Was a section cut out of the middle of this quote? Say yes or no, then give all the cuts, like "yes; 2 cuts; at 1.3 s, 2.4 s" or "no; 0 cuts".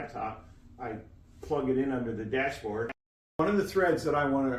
yes; 1 cut; at 3.2 s